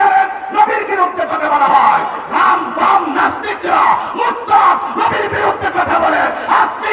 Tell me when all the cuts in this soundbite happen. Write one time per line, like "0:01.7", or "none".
none